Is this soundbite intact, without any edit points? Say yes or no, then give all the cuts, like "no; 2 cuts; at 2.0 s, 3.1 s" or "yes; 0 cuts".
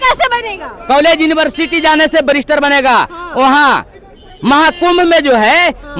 yes; 0 cuts